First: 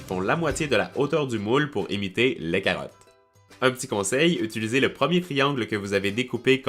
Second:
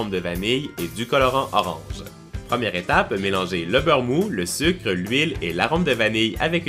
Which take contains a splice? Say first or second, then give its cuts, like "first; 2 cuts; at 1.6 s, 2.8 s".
first; 1 cut; at 4.5 s